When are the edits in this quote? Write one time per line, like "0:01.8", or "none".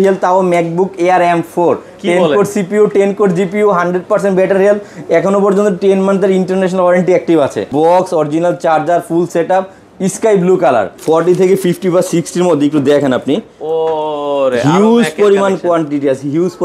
0:07.7
0:10.9